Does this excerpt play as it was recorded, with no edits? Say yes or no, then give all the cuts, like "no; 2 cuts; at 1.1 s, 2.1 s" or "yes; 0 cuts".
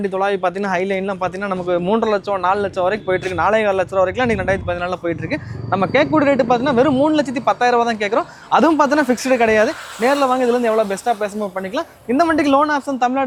yes; 0 cuts